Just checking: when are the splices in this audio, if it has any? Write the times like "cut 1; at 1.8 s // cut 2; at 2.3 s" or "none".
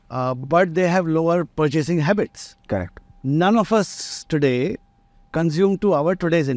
cut 1; at 1.5 s